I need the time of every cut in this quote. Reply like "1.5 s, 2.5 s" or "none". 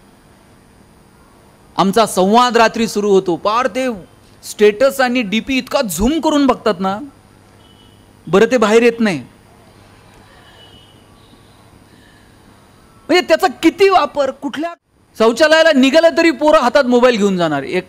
14.4 s